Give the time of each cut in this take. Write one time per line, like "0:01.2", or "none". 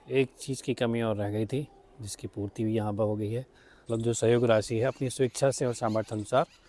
0:03.8